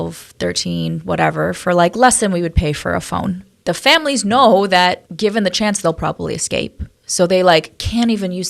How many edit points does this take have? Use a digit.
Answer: 2